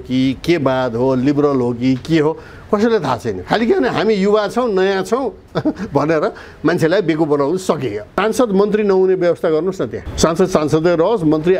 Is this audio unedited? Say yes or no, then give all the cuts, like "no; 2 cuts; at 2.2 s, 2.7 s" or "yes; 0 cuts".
no; 1 cut; at 8.1 s